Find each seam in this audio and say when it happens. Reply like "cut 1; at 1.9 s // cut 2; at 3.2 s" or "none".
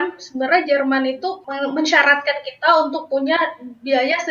cut 1; at 1.4 s